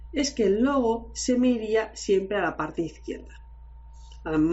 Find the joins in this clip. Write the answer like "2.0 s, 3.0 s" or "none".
none